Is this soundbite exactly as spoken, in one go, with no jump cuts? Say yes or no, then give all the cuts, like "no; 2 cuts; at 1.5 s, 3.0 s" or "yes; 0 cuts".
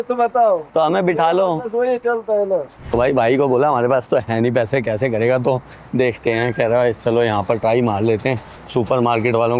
yes; 0 cuts